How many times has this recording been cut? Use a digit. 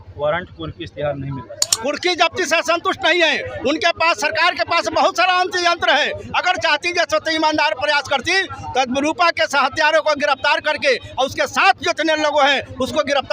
1